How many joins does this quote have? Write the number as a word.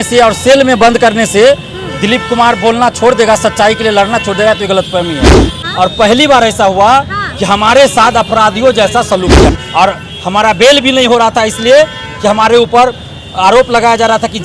two